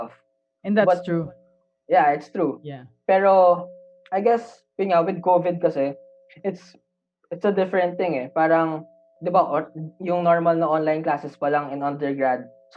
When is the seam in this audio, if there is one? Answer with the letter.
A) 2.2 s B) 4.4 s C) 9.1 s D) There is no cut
C